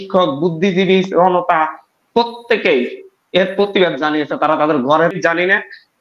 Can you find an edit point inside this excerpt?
yes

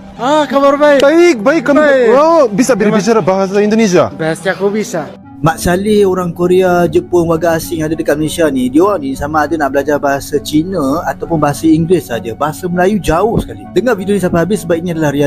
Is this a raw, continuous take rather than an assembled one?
no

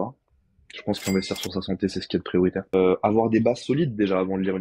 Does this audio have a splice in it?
yes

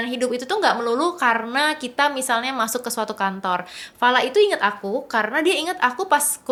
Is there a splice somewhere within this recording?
no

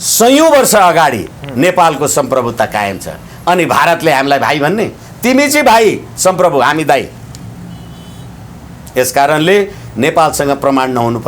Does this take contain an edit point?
no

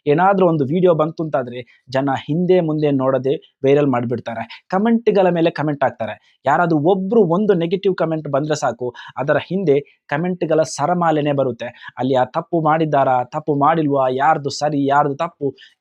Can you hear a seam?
no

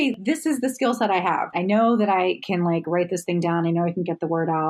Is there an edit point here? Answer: no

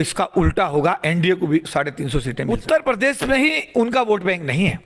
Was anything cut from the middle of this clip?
yes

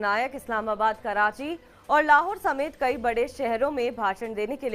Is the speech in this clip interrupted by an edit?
no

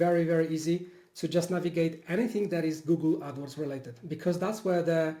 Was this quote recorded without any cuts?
yes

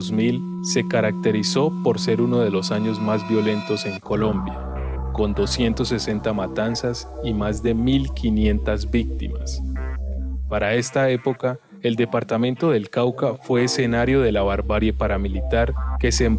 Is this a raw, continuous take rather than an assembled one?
yes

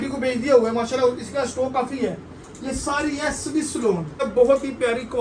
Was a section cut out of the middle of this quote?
yes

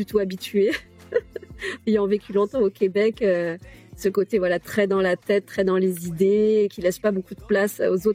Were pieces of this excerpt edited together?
no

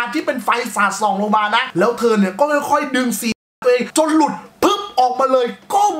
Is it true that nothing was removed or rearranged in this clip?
yes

